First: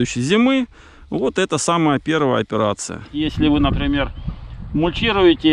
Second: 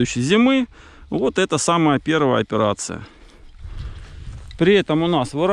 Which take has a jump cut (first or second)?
first